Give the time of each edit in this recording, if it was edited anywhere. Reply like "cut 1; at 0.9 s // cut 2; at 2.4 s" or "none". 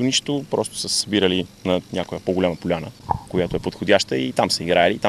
cut 1; at 2.9 s